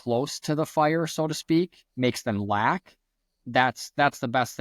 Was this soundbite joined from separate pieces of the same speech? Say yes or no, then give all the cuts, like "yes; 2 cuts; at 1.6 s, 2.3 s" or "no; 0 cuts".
no; 0 cuts